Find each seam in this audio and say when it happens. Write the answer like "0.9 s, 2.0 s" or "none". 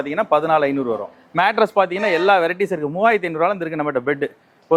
1.2 s